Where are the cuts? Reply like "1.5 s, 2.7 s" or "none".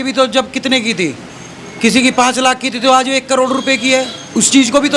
none